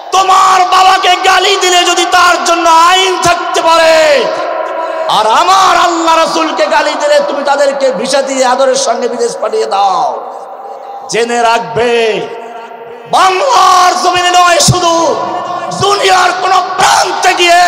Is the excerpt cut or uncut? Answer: uncut